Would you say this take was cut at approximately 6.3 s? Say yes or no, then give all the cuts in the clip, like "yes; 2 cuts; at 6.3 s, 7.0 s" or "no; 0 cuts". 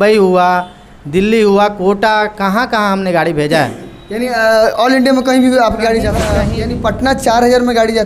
yes; 1 cut; at 6.3 s